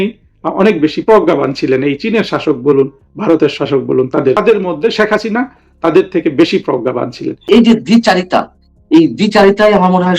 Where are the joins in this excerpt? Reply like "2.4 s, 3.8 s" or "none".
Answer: 7.3 s